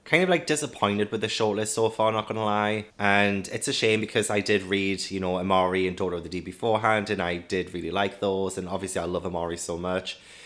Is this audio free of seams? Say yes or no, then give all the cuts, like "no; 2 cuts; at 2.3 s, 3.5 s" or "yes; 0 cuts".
yes; 0 cuts